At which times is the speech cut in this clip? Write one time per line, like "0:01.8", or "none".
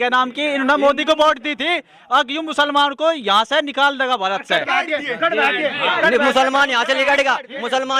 none